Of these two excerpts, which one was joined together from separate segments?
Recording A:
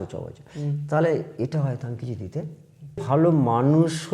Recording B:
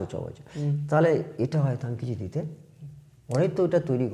A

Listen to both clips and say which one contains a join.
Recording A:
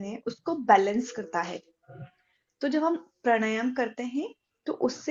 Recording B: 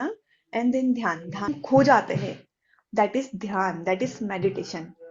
B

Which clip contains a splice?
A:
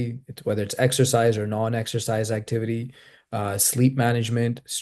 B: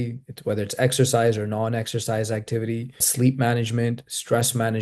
B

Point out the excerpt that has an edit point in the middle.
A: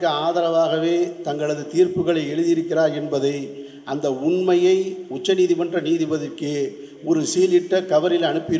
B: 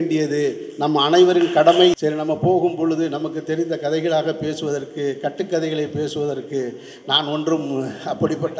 B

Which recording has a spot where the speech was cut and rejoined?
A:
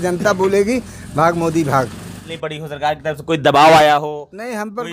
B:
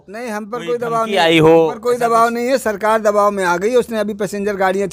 A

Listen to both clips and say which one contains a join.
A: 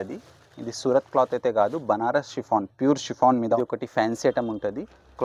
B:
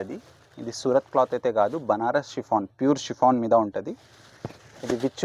A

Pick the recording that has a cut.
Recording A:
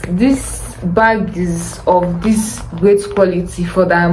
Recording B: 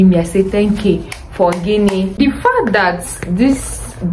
B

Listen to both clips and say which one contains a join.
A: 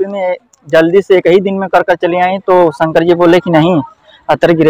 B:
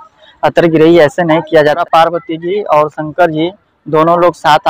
B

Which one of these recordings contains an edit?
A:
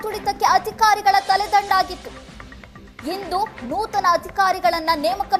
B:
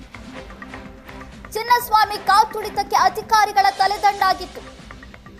B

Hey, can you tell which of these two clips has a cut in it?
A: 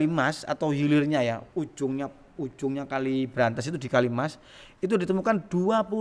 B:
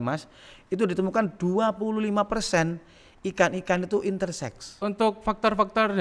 B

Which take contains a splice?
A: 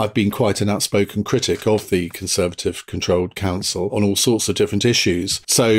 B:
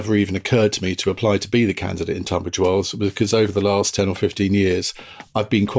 A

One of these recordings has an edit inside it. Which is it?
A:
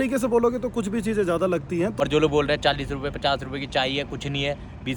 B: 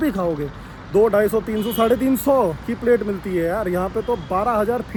A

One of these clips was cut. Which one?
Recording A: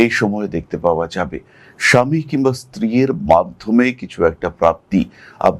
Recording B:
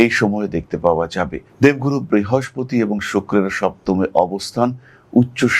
B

